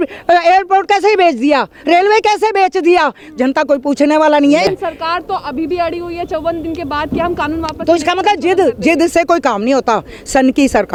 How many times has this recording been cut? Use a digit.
0